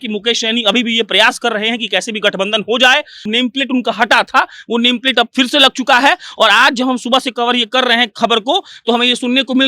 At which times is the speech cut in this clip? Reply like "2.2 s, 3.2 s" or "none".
3.2 s